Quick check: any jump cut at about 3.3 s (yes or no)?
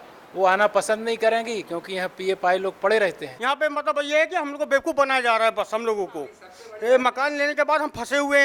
yes